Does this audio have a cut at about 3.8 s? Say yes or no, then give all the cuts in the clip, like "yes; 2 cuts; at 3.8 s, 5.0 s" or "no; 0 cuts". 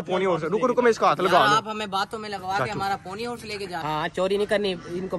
yes; 1 cut; at 3.8 s